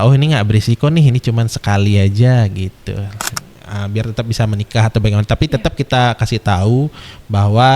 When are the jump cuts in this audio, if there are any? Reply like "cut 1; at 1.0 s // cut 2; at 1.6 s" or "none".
cut 1; at 3.4 s